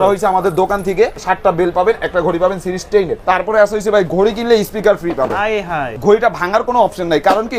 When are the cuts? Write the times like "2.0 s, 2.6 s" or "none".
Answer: 1.2 s, 3.2 s, 5.9 s